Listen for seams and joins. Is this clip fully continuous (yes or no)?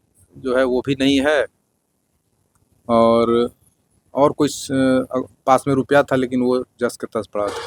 yes